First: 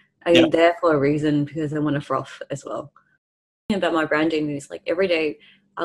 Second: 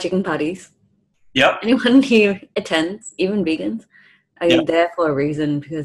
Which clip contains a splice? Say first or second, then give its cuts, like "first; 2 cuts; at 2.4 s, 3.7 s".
first; 1 cut; at 3.7 s